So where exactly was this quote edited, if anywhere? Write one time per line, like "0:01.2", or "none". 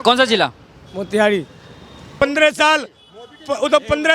0:02.1